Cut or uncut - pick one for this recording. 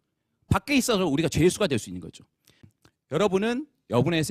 cut